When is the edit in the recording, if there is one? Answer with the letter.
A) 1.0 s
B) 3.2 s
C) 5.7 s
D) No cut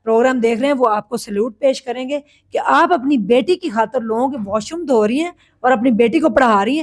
D